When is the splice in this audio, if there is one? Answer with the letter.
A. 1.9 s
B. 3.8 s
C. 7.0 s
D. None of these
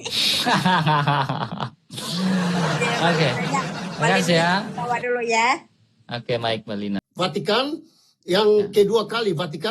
C